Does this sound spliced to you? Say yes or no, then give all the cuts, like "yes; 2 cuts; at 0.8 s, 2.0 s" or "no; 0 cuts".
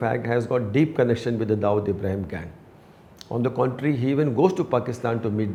no; 0 cuts